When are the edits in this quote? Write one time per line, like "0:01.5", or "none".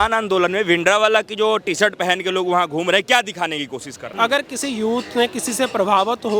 0:04.1

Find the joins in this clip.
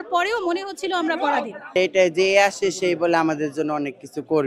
0:01.8

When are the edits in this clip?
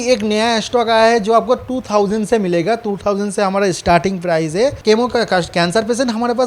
0:04.8

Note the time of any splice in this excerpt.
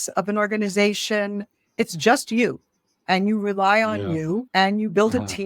0:01.7
0:04.5

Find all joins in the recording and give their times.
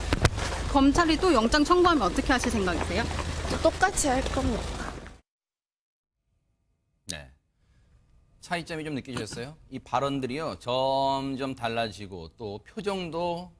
none

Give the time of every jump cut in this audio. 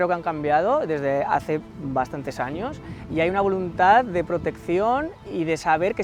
none

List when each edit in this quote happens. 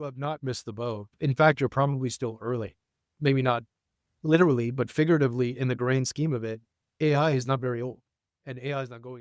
0:01.1
0:03.1

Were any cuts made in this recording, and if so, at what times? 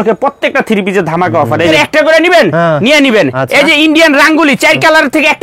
0:01.7

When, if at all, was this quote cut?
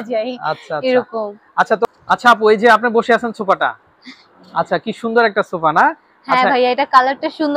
0:01.9

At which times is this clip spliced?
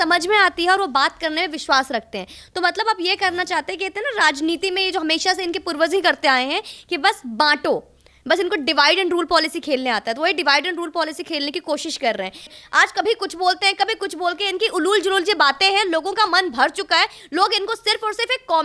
0:12.6

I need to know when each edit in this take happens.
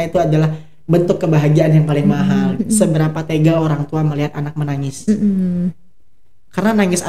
0:02.5

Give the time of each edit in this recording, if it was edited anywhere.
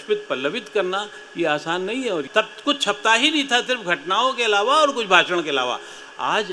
0:02.3

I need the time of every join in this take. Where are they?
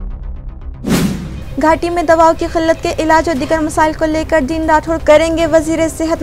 0:00.9

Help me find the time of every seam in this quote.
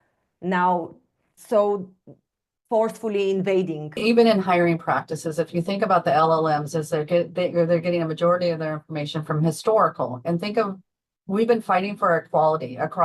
0:04.0

